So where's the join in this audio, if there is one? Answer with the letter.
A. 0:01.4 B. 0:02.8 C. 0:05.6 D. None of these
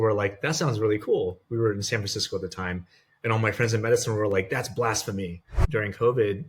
C